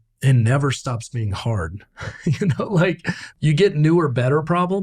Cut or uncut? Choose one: cut